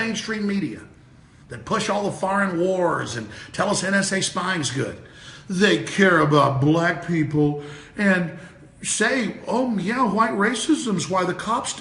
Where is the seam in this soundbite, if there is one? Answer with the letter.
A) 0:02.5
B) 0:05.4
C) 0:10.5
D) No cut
A